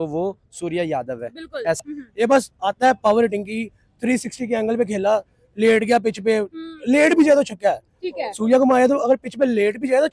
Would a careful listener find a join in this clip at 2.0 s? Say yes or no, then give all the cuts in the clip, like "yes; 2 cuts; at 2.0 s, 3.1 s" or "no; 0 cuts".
yes; 1 cut; at 2.0 s